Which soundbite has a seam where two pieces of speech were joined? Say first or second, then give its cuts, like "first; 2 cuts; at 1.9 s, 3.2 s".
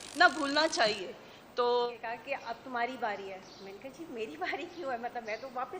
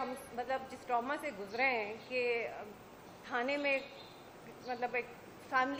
first; 1 cut; at 1.9 s